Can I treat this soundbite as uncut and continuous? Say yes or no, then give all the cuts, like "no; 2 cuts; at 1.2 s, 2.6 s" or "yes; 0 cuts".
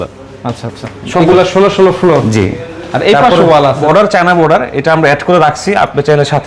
no; 2 cuts; at 1.3 s, 3.8 s